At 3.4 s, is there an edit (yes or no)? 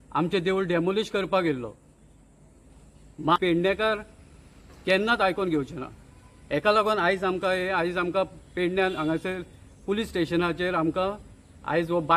yes